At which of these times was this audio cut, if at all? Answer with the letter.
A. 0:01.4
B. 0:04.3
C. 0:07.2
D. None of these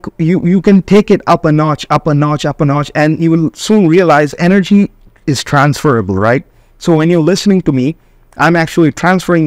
B